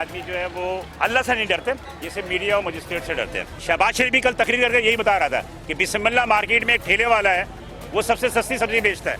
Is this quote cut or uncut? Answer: cut